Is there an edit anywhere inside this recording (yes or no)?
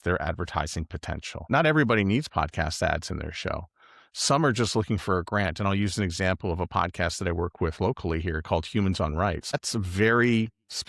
yes